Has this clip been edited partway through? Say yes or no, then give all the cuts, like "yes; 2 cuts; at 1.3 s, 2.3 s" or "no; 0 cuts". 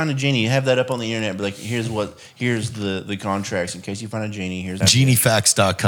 yes; 1 cut; at 4.8 s